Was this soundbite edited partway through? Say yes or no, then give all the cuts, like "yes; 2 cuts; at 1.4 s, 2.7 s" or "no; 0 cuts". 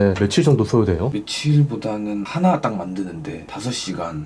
yes; 1 cut; at 1.1 s